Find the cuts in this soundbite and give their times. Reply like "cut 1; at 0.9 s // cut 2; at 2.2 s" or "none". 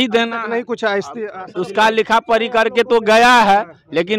none